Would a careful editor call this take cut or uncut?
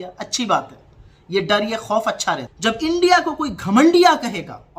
cut